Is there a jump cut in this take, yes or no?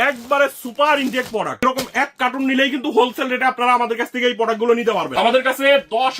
yes